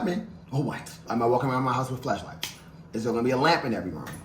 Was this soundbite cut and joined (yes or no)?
yes